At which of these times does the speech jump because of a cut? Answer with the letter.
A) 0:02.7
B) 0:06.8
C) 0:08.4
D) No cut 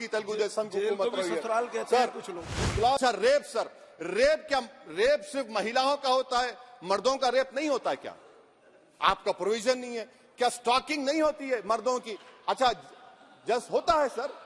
A